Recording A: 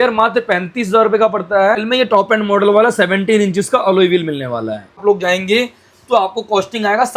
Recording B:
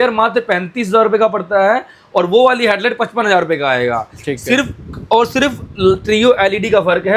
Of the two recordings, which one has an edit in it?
A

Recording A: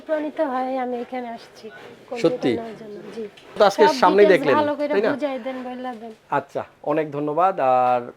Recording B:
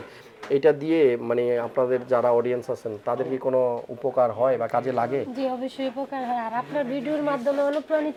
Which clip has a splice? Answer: A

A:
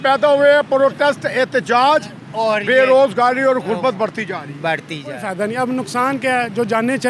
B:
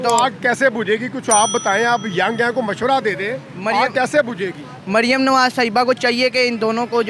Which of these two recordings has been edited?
A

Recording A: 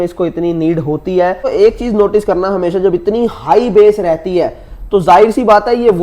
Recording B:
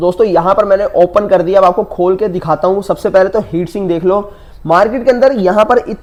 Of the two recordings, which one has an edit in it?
A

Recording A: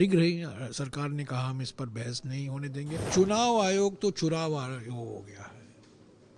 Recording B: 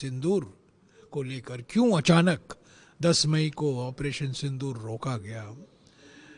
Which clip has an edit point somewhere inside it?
A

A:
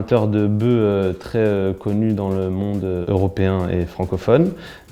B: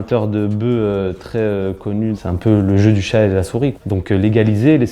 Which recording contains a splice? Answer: B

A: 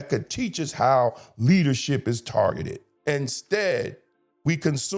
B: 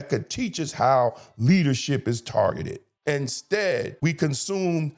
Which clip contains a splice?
B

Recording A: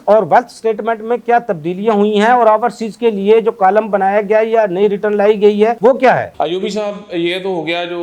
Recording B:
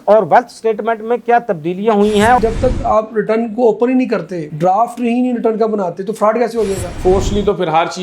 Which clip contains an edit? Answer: B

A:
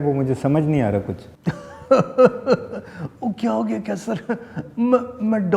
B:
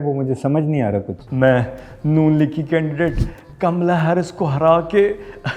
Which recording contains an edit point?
B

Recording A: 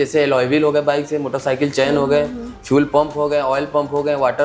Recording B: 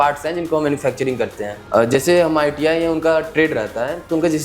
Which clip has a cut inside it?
B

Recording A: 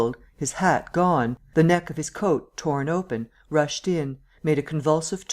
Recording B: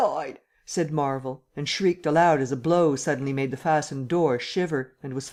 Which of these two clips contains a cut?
A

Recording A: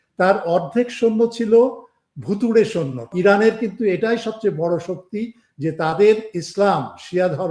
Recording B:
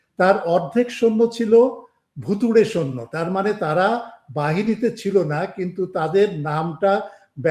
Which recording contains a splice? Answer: A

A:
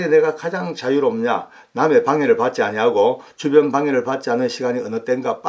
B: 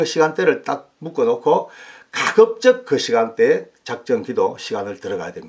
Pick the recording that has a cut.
B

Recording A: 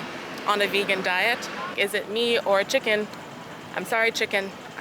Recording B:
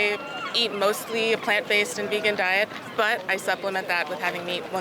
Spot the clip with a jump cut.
A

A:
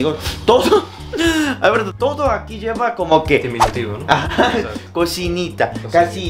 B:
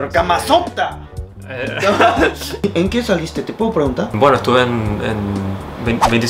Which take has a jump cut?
B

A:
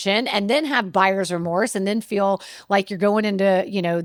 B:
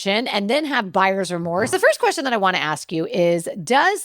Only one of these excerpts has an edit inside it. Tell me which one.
B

